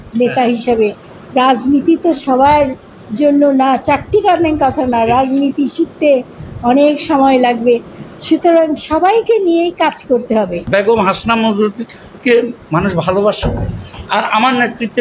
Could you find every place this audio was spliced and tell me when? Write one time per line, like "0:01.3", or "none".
0:10.6

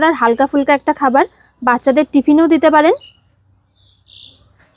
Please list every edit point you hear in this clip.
none

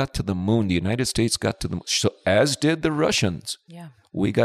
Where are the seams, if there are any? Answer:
none

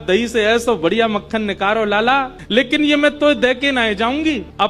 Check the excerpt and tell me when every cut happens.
0:03.3

